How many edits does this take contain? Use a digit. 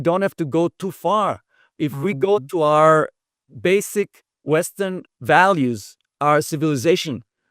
2